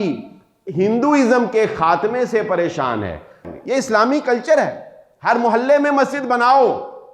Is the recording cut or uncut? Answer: cut